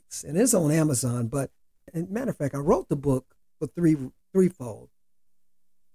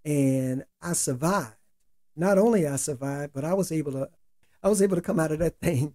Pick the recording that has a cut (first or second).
first